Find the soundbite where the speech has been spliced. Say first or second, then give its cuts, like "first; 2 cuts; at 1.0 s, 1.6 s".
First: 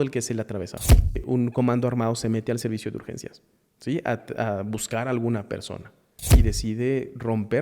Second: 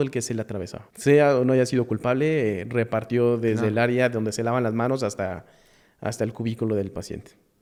first; 2 cuts; at 1.0 s, 6.3 s